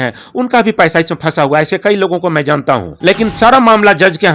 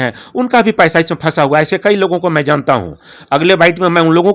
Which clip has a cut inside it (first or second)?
first